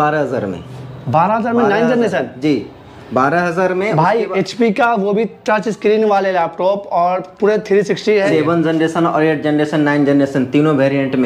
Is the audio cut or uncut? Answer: cut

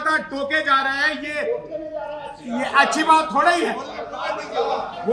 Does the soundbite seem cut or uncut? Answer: uncut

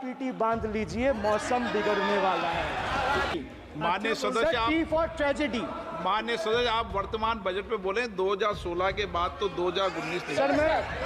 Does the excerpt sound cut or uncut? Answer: cut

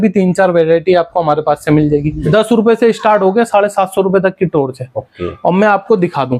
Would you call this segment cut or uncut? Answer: cut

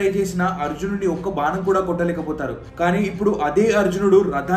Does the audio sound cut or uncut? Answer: uncut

